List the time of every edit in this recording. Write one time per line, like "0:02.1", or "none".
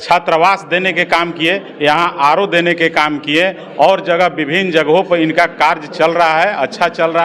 none